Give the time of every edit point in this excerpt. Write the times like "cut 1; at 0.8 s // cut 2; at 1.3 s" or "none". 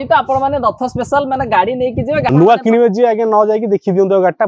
cut 1; at 2.3 s